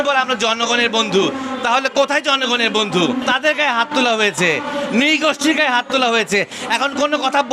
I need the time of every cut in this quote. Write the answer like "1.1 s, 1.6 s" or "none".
3.3 s